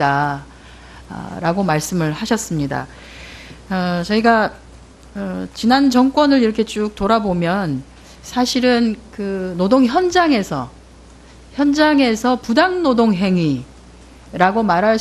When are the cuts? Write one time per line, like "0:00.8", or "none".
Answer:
0:07.3